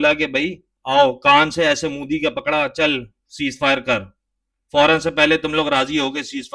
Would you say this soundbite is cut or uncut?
uncut